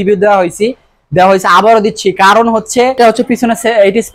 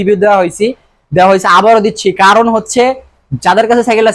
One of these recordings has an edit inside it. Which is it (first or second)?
first